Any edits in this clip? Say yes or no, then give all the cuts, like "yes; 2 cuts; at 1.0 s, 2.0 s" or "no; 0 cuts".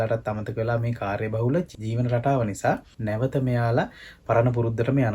yes; 2 cuts; at 1.7 s, 2.9 s